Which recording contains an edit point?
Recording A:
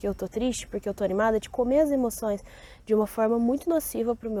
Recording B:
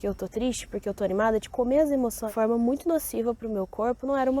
B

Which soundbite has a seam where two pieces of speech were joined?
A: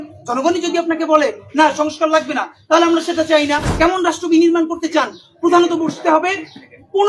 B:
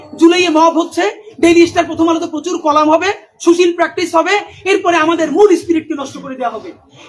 A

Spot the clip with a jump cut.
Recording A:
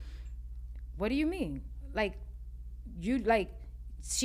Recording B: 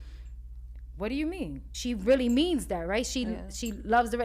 B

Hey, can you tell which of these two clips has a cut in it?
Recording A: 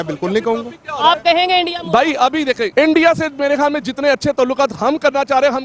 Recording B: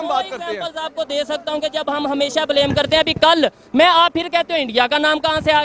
A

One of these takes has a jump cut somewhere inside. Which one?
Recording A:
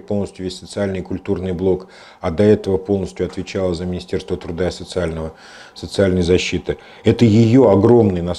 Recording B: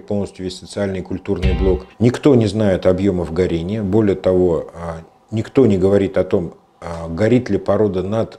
B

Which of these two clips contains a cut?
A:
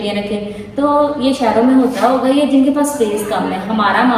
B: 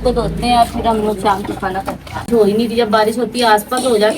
B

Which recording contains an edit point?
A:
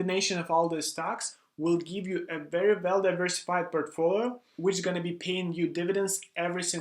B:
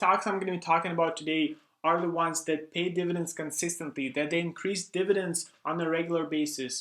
A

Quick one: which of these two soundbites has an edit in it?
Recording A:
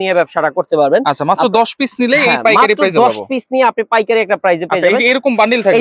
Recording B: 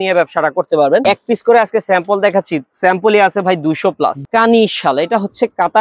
B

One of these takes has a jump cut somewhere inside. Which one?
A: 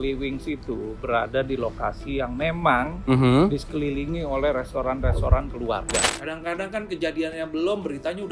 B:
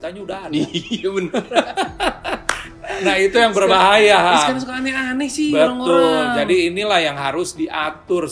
A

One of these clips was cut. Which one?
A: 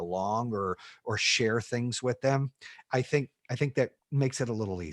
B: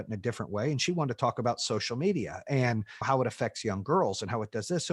A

